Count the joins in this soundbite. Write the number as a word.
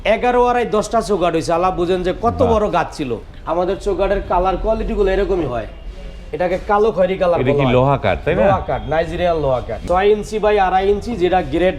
two